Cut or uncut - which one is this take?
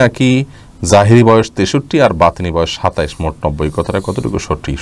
uncut